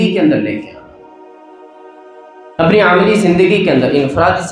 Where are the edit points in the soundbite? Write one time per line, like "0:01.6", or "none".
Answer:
0:01.2
0:02.5